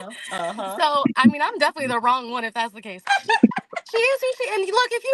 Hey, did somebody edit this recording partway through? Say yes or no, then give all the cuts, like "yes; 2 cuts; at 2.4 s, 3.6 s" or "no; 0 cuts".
yes; 1 cut; at 3.0 s